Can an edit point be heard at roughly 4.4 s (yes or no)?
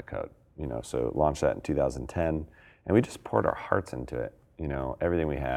no